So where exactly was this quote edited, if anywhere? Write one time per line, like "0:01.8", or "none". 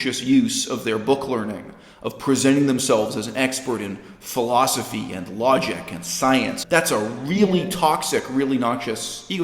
0:06.6